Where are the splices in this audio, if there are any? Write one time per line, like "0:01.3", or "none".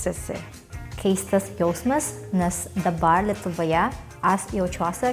0:00.9
0:04.1